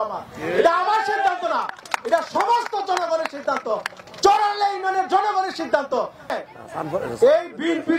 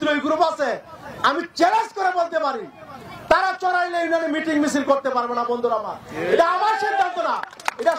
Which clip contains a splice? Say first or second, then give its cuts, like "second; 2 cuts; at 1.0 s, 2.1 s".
first; 1 cut; at 6.3 s